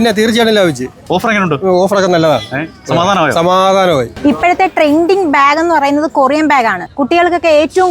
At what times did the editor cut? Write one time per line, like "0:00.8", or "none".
0:04.1
0:06.9